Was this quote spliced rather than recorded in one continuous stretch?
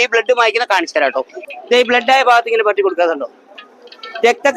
yes; 1 cut; at 1.3 s

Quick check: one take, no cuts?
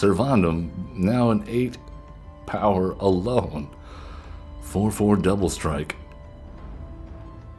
yes; 0 cuts

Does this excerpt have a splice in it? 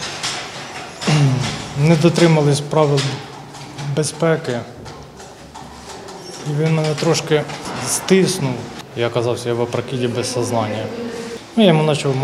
yes; 3 cuts; at 7.6 s, 8.7 s, 11.2 s

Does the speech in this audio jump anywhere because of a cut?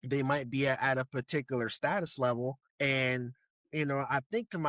yes; 1 cut; at 2.7 s

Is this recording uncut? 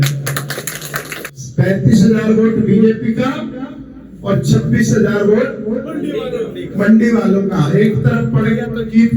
no; 1 cut; at 1.2 s

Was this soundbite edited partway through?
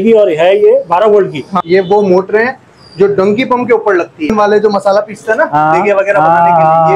yes; 2 cuts; at 1.5 s, 4.3 s

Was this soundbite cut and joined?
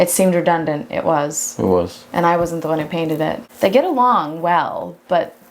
yes; 1 cut; at 3.4 s

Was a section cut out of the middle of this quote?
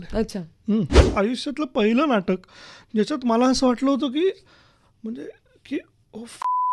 yes; 1 cut; at 1.1 s

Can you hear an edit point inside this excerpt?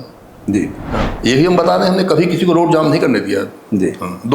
yes; 1 cut; at 1.1 s

